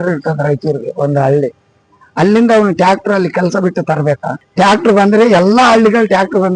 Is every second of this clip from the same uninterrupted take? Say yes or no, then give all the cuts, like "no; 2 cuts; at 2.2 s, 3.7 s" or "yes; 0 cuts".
no; 1 cut; at 4.4 s